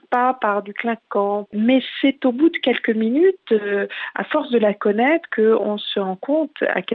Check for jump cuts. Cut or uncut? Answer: cut